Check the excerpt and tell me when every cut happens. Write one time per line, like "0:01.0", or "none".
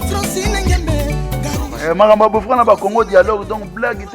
0:01.0